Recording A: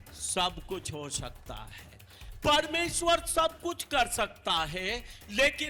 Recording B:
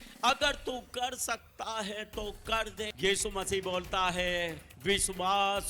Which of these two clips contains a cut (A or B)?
B